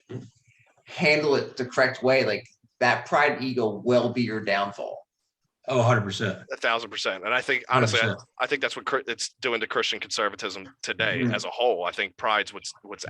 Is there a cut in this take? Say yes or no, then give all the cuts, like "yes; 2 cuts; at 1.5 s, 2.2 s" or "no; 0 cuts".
no; 0 cuts